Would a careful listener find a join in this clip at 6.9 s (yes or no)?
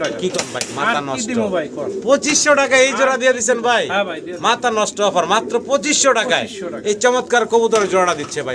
no